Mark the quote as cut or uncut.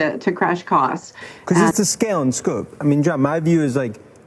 cut